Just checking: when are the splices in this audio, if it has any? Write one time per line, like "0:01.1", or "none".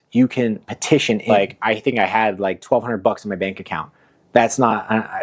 0:01.3